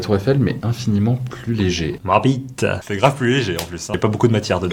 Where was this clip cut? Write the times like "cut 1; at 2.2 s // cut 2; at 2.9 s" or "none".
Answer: cut 1; at 1.9 s // cut 2; at 2.8 s